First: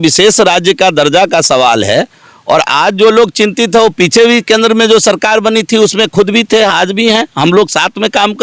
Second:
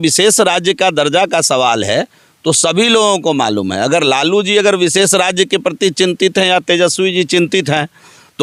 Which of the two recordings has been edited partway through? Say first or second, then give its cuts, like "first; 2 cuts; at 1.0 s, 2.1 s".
first; 1 cut; at 2.2 s